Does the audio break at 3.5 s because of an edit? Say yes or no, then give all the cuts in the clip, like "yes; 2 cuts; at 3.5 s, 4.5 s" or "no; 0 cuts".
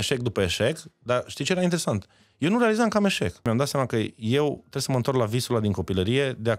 yes; 1 cut; at 3.5 s